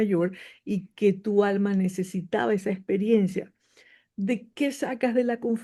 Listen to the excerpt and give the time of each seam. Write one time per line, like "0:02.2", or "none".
none